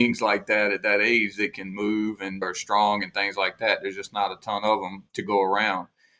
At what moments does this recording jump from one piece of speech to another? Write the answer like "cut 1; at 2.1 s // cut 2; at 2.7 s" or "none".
cut 1; at 2.4 s // cut 2; at 5.0 s